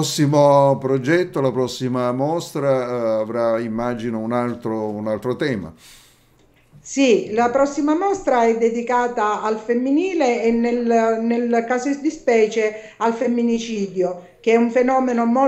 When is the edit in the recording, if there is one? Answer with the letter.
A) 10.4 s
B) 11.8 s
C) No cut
A